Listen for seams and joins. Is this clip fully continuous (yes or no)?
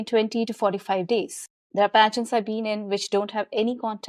yes